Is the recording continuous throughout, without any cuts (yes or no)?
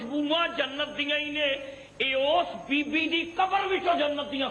yes